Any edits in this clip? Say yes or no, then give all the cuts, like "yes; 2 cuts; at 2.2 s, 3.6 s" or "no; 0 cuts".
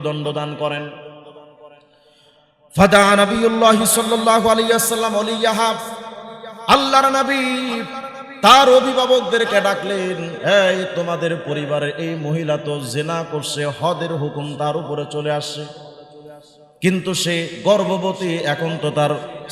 no; 0 cuts